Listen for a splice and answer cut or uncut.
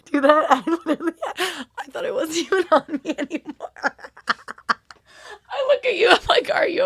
uncut